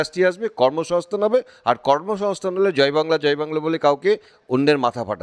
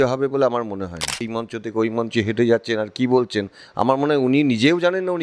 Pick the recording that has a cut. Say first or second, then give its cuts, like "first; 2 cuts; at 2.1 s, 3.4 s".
second; 1 cut; at 1.4 s